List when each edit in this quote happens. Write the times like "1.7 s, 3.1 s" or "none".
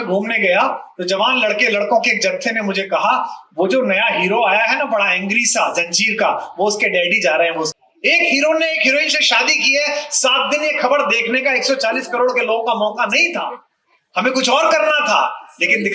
7.7 s